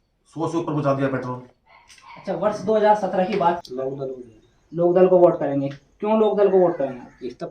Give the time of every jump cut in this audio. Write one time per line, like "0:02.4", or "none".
0:03.6